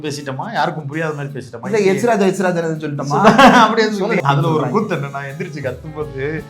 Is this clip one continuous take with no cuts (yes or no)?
no